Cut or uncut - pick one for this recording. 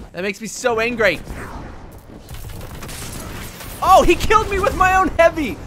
uncut